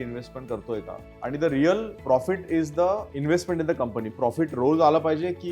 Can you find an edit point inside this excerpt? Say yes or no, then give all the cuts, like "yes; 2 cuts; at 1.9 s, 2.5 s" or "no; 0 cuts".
yes; 4 cuts; at 1.0 s, 1.9 s, 3.1 s, 4.0 s